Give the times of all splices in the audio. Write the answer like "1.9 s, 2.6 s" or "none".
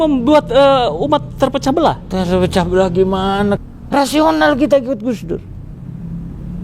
3.7 s

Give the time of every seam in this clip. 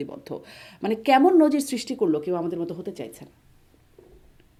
none

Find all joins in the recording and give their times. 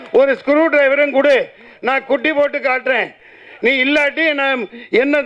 none

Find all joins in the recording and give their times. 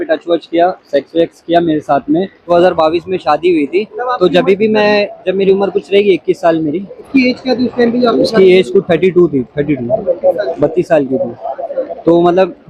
2.4 s, 7.0 s

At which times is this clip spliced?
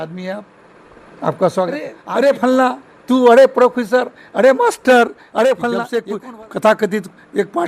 2.0 s, 6.0 s

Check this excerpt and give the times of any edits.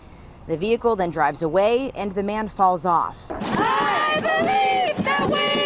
3.3 s

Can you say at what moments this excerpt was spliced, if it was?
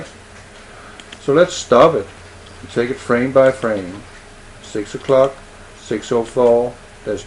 none

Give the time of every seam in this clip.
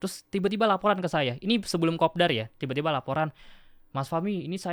none

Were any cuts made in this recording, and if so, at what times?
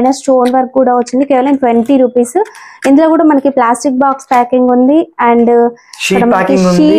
none

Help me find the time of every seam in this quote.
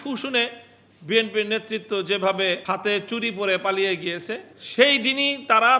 2.6 s, 4.5 s

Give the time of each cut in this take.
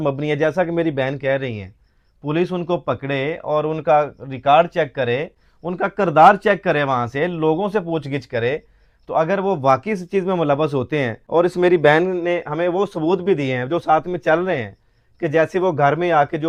none

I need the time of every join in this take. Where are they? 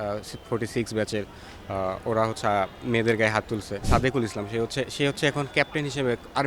3.8 s

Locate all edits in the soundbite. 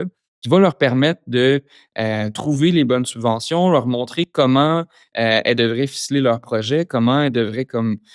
none

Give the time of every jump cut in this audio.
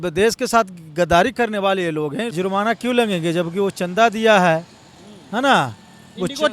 2.3 s

